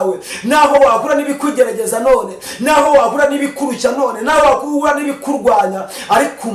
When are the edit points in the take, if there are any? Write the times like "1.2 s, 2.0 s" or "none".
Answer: none